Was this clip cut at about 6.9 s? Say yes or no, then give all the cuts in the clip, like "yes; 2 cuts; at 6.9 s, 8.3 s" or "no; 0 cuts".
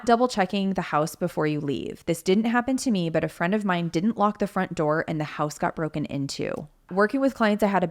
yes; 1 cut; at 6.9 s